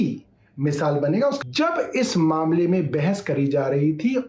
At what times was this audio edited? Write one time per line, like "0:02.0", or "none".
0:01.4